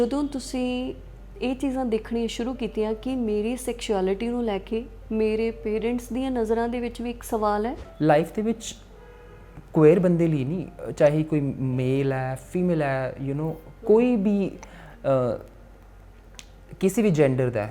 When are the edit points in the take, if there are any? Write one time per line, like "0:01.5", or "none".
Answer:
0:07.8